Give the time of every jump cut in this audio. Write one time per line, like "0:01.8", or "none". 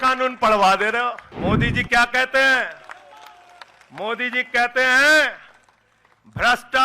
0:01.3